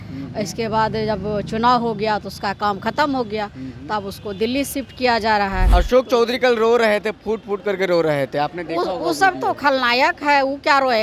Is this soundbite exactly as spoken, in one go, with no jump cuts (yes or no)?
no